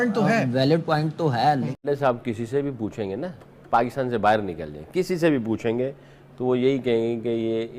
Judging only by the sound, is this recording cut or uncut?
cut